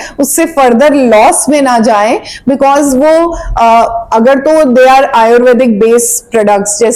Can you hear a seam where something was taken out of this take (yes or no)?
no